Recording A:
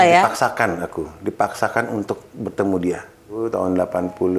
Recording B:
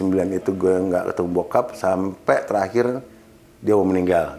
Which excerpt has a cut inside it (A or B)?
A